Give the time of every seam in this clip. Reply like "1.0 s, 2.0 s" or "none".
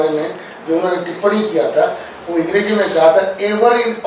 none